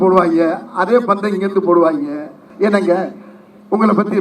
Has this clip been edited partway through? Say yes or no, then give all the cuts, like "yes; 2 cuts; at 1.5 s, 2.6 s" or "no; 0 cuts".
yes; 1 cut; at 2.4 s